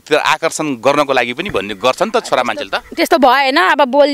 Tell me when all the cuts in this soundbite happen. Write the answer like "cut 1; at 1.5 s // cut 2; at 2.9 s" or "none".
none